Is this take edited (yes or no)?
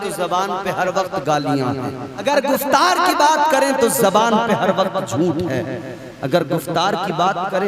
yes